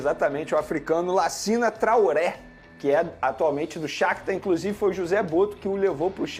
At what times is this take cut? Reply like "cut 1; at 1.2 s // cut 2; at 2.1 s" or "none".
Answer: none

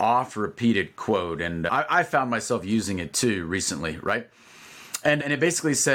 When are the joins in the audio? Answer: none

